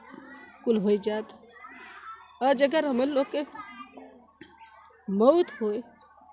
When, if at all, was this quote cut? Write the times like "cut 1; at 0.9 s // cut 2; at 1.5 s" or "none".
none